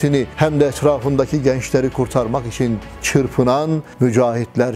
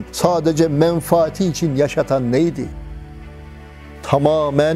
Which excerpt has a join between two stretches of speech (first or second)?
second